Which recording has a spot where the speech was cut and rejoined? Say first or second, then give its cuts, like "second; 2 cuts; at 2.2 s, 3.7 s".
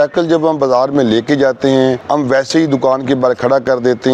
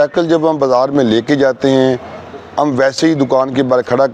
first; 1 cut; at 2.0 s